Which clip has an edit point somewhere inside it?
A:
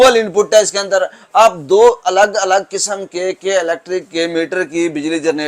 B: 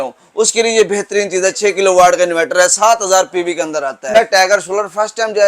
B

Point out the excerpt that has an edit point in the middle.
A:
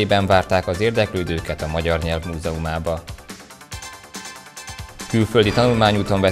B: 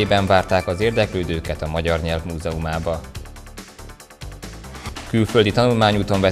B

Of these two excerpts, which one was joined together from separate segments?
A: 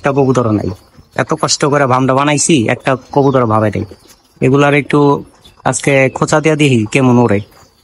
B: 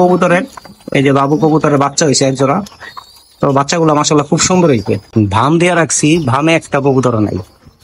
B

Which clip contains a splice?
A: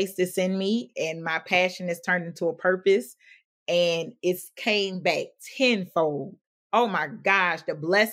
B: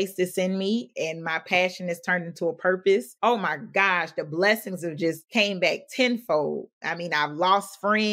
B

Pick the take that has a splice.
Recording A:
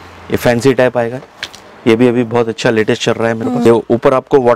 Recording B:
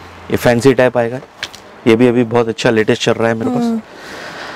A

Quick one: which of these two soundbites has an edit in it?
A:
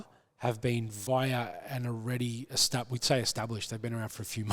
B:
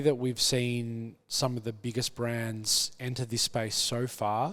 A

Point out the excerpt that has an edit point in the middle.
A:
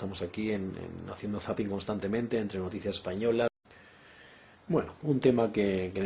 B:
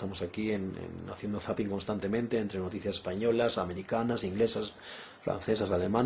B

